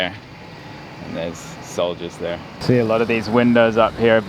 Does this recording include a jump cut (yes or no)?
yes